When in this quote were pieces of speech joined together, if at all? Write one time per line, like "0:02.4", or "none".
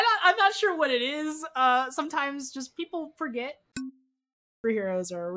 0:03.9